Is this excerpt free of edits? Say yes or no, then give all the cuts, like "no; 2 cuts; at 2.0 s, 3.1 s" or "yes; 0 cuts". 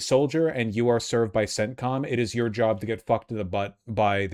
yes; 0 cuts